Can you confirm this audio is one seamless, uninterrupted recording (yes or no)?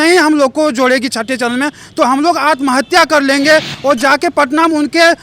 yes